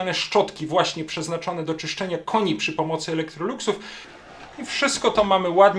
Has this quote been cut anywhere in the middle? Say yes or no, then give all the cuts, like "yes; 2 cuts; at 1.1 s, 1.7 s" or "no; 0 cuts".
yes; 1 cut; at 4.0 s